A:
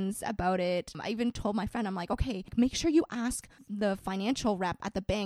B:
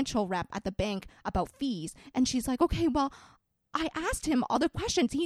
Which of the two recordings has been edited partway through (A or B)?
A